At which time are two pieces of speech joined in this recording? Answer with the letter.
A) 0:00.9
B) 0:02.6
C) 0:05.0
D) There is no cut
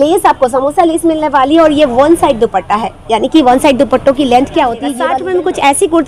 C